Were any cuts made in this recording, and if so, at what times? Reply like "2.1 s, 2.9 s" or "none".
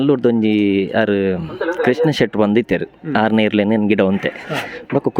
none